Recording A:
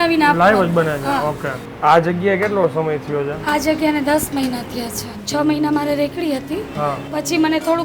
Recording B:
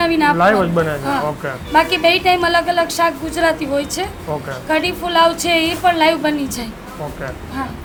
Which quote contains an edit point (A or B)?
A